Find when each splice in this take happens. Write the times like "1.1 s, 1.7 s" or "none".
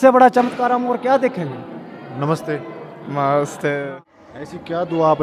3.9 s